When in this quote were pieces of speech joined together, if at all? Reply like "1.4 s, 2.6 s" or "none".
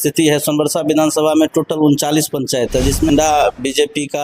3.1 s